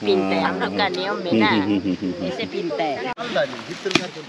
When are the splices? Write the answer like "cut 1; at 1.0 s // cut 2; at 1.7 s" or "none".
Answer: cut 1; at 3.1 s